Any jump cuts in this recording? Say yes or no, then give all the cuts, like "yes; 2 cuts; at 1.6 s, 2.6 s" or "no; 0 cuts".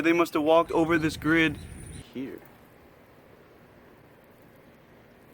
yes; 1 cut; at 2.1 s